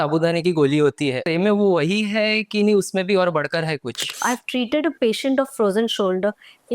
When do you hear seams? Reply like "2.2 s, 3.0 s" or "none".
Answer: 1.2 s, 4.2 s